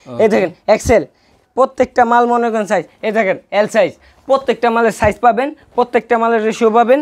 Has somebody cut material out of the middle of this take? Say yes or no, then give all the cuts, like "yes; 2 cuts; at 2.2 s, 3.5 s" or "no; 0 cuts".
no; 0 cuts